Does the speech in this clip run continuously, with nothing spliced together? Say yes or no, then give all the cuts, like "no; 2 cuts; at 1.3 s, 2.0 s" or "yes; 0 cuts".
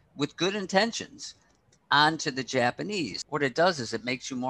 no; 1 cut; at 3.2 s